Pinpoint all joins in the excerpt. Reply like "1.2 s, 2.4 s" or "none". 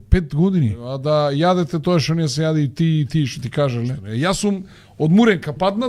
0.9 s, 4.0 s